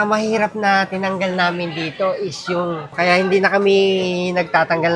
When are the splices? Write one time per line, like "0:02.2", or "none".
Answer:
0:02.9